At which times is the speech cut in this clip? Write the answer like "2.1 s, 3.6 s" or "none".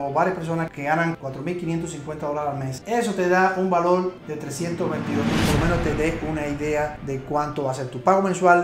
2.8 s, 5.4 s